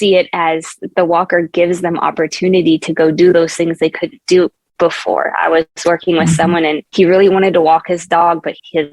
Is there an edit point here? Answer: yes; 1 cut; at 6.8 s

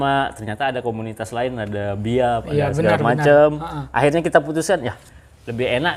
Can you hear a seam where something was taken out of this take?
no; 0 cuts

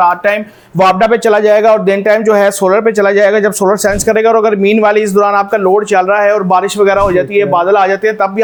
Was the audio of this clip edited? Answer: no; 0 cuts

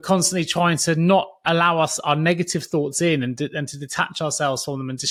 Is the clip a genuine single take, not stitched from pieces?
yes; 0 cuts

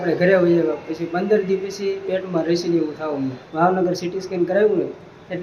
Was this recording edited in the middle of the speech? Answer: yes; 1 cut; at 3.4 s

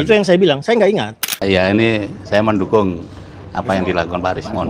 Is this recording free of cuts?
no; 1 cut; at 1.3 s

